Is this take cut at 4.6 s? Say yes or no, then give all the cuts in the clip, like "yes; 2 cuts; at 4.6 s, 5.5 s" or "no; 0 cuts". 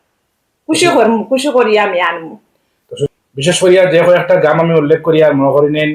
no; 1 cut; at 2.9 s